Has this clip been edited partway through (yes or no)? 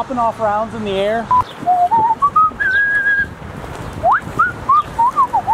no